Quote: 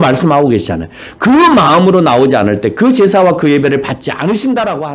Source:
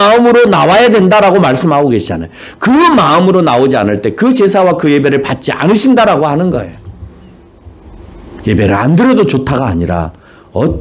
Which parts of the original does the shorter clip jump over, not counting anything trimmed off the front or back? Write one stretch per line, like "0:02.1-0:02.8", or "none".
none